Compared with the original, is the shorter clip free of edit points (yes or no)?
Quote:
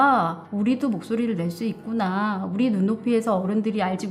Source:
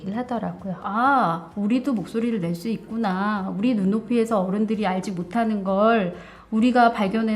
yes